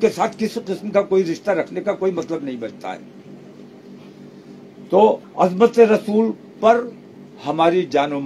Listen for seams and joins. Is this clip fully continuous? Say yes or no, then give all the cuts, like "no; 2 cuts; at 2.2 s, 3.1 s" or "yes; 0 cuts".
yes; 0 cuts